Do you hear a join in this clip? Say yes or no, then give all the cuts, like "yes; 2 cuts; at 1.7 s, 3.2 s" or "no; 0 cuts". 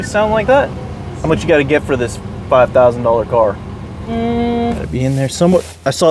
yes; 2 cuts; at 1.1 s, 4.8 s